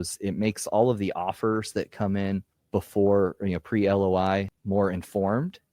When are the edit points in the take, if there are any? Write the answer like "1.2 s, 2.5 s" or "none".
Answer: 2.6 s, 4.6 s